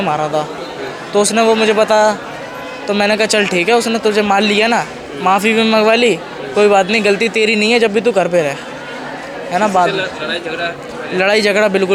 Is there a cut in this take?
no; 0 cuts

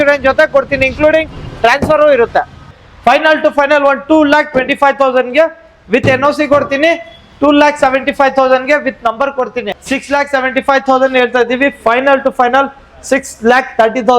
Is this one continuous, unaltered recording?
no; 2 cuts; at 2.7 s, 9.6 s

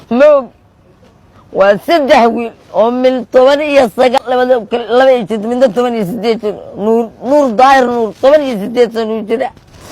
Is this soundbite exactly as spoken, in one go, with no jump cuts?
no; 1 cut; at 4.2 s

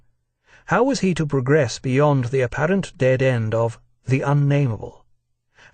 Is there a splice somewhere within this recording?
yes; 1 cut; at 4.2 s

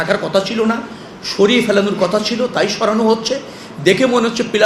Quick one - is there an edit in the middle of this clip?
no; 0 cuts

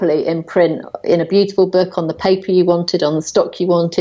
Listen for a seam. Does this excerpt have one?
no; 0 cuts

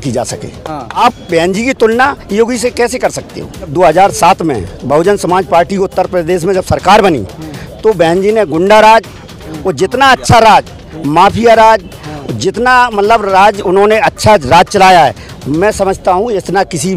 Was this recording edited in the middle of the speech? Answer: yes; 2 cuts; at 1.0 s, 3.7 s

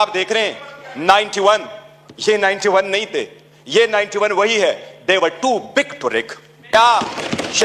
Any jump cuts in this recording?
yes; 1 cut; at 6.7 s

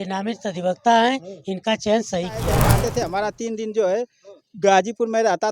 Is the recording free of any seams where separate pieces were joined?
no; 1 cut; at 2.6 s

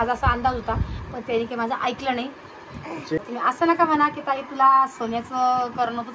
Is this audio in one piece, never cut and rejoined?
no; 1 cut; at 3.2 s

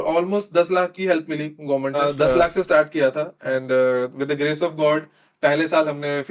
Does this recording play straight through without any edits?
no; 1 cut; at 2.0 s

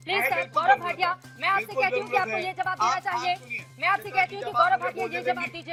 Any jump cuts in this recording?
no; 0 cuts

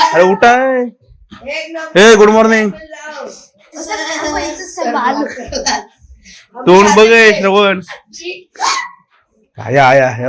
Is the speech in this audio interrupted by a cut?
no; 0 cuts

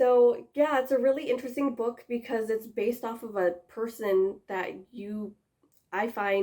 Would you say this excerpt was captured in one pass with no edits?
yes; 0 cuts

